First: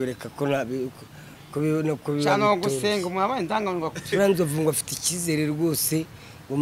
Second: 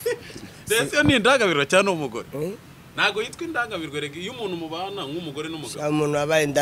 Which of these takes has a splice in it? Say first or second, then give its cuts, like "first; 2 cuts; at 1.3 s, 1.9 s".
first; 1 cut; at 4.0 s